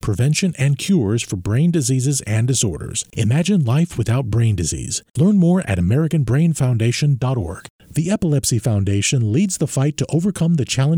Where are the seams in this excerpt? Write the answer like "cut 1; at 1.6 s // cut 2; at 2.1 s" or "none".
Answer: cut 1; at 7.7 s

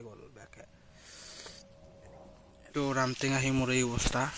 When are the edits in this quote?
cut 1; at 2.6 s

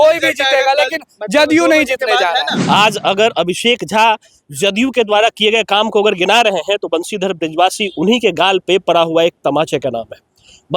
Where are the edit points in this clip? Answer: cut 1; at 2.5 s

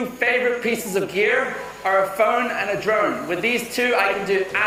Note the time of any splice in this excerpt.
none

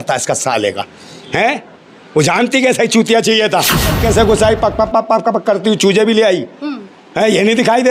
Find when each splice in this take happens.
cut 1; at 3.9 s

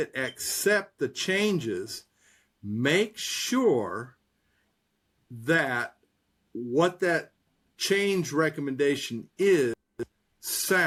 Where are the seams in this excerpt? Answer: none

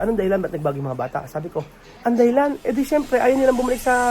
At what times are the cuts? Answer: cut 1; at 1.8 s

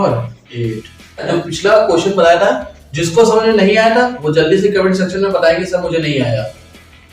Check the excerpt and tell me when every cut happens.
cut 1; at 1.3 s

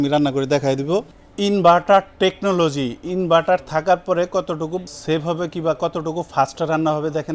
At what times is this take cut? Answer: cut 1; at 1.1 s // cut 2; at 4.8 s

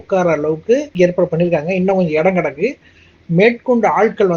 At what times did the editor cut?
cut 1; at 0.9 s

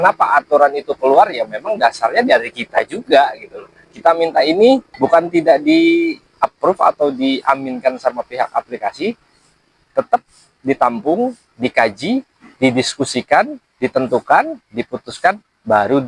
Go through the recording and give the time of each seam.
cut 1; at 4.9 s // cut 2; at 12.4 s // cut 3; at 13.6 s

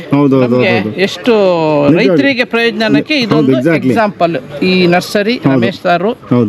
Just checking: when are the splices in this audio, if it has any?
none

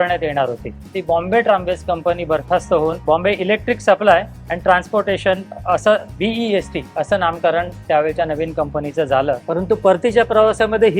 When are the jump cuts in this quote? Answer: cut 1; at 0.9 s // cut 2; at 3.0 s // cut 3; at 5.5 s // cut 4; at 9.4 s

